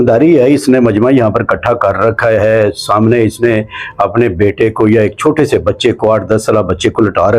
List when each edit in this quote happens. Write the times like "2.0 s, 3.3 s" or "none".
none

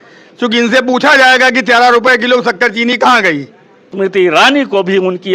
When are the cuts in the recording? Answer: 3.9 s

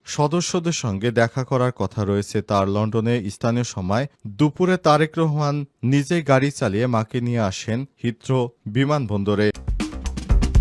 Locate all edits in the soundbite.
9.7 s

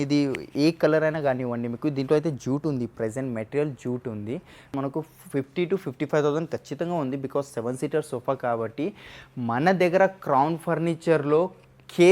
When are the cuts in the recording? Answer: 4.7 s

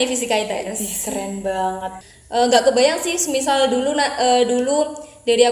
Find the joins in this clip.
1.9 s

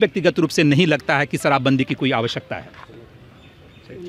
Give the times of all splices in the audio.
none

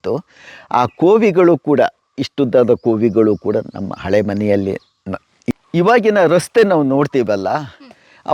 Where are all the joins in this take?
5.3 s

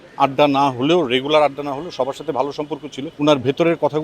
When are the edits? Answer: 3.0 s

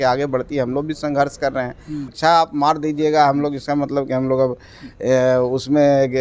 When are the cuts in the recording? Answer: 2.1 s

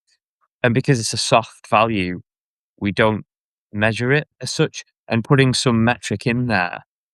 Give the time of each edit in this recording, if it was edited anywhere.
4.4 s

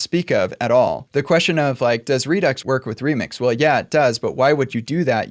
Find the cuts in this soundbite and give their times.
1.0 s, 2.6 s

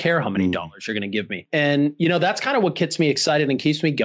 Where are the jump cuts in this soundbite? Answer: 1.4 s

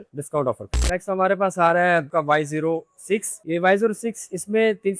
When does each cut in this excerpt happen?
none

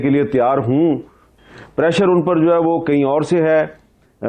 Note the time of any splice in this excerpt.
1.3 s

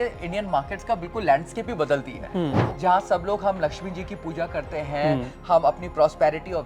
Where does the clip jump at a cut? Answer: 2.6 s

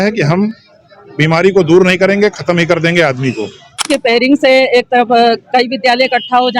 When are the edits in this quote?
3.9 s

